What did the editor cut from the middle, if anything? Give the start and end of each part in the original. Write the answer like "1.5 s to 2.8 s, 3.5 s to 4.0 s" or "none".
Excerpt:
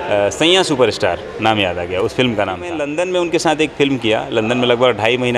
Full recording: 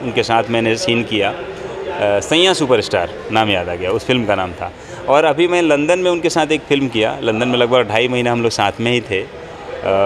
4.7 s to 5.7 s